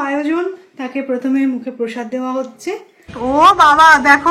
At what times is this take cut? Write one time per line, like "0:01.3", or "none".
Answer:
0:03.0